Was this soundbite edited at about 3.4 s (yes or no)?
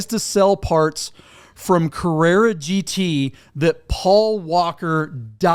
no